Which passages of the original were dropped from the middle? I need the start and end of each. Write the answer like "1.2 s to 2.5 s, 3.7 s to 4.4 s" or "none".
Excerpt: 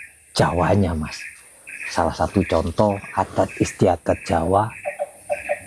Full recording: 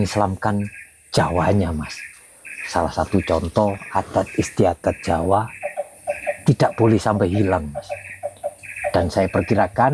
none